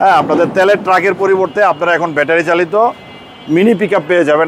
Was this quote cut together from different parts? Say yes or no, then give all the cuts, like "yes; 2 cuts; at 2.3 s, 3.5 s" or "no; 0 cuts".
no; 0 cuts